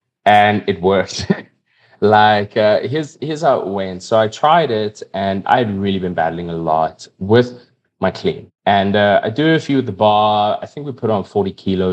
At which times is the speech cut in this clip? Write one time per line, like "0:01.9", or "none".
0:05.4
0:07.1
0:08.5